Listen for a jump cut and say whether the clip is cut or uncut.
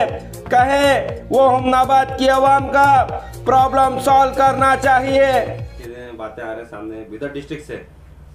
cut